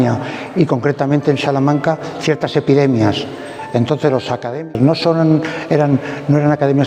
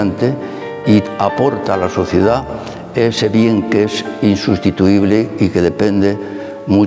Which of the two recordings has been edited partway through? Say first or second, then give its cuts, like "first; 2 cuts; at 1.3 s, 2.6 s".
first; 1 cut; at 4.6 s